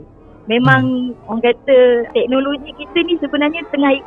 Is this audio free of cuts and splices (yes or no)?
yes